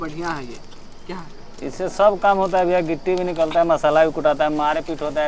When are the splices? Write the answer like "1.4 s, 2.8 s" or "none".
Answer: none